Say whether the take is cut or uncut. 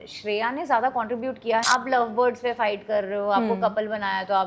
cut